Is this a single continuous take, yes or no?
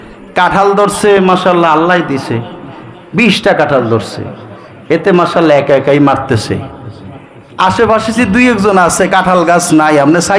yes